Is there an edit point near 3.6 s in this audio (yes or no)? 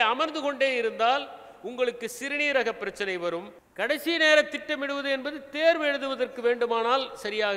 yes